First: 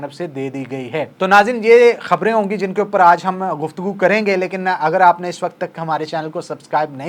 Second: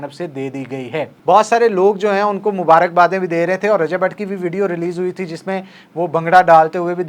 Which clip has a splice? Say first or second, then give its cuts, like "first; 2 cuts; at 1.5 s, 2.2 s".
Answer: second; 1 cut; at 1.2 s